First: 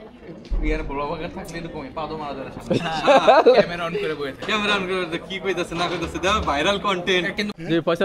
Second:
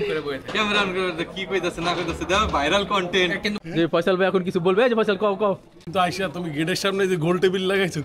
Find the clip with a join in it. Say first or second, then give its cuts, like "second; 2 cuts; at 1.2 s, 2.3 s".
second; 1 cut; at 5.7 s